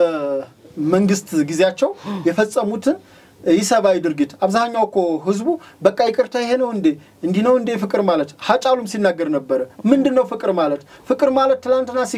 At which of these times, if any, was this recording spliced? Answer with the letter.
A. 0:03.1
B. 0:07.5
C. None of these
C